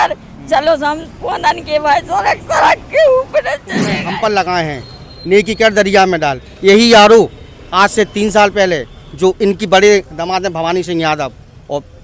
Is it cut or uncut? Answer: cut